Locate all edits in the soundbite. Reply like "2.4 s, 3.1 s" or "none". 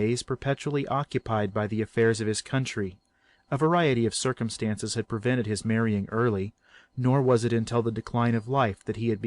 6.4 s